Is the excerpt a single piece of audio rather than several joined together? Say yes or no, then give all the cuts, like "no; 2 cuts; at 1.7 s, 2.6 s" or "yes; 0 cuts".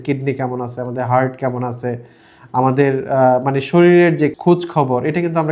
no; 1 cut; at 4.4 s